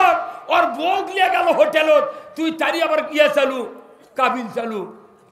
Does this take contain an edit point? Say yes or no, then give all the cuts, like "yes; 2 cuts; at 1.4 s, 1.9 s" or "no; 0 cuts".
no; 0 cuts